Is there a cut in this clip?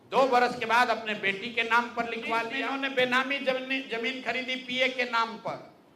yes; 1 cut; at 2.9 s

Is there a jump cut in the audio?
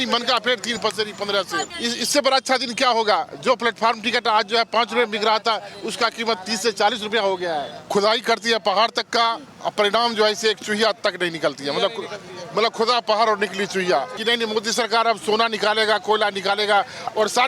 yes; 3 cuts; at 1.6 s, 7.8 s, 14.1 s

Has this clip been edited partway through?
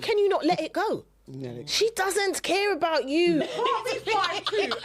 yes; 1 cut; at 3.4 s

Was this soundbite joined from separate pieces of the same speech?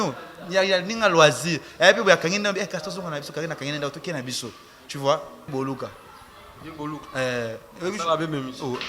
yes; 1 cut; at 5.5 s

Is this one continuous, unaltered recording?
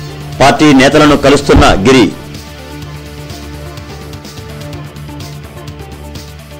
no; 1 cut; at 2.1 s

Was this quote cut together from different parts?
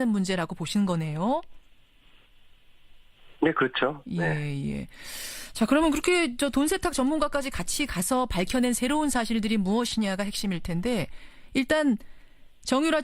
yes; 1 cut; at 11.9 s

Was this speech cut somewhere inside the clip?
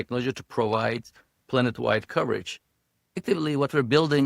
yes; 1 cut; at 3.2 s

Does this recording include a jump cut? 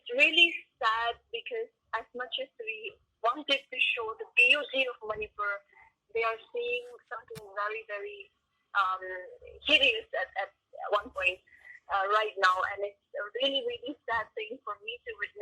no; 0 cuts

